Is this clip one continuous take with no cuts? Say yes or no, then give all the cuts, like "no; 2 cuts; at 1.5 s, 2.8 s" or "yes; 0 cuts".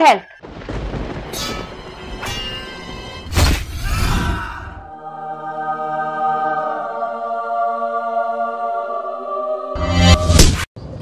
yes; 0 cuts